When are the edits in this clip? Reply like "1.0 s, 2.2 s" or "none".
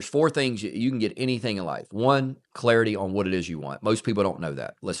none